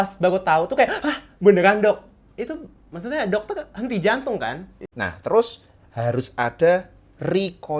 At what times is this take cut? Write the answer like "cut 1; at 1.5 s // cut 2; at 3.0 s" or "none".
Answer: cut 1; at 4.7 s